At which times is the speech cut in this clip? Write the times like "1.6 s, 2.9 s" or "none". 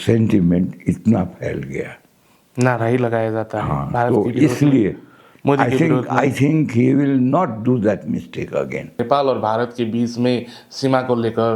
9.0 s